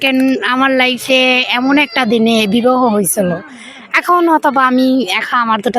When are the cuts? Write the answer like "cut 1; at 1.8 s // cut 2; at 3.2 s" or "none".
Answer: none